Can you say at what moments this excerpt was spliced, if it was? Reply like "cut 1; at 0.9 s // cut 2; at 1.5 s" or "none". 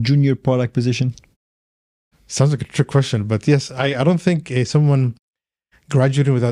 none